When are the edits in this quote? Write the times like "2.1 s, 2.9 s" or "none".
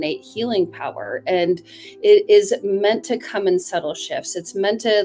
none